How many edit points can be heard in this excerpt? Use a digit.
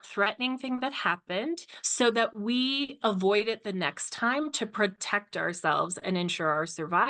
0